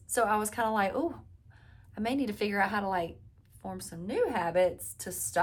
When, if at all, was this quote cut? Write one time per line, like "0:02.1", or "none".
none